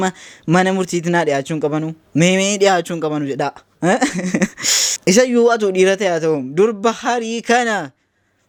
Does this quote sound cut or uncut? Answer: uncut